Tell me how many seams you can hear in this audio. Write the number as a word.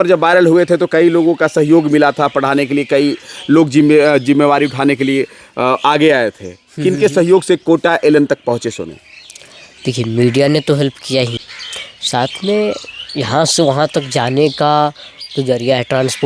one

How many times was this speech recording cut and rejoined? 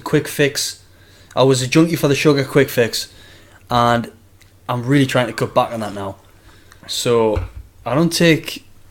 one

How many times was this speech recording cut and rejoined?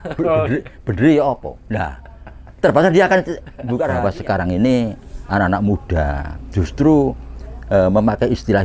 one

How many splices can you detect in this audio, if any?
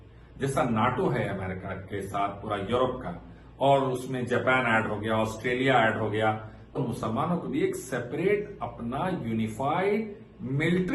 zero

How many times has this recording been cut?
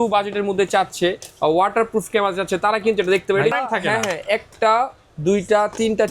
one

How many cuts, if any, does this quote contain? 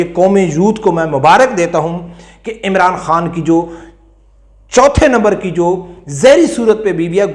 zero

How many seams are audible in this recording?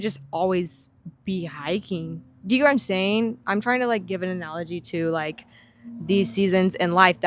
zero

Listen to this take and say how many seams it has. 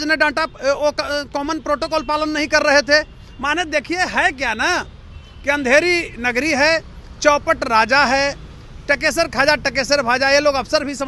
zero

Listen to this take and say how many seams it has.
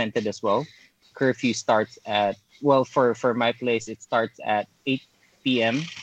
one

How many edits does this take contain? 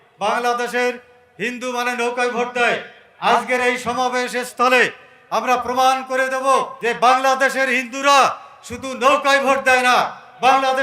one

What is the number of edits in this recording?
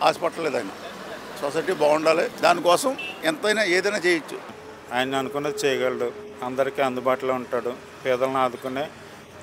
three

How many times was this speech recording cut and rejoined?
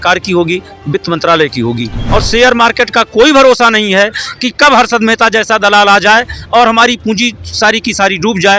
one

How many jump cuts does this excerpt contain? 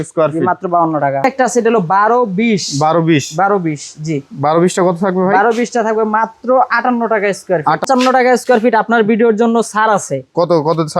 two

